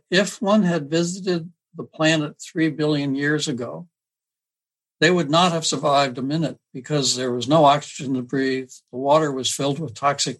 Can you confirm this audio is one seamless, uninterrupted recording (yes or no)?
yes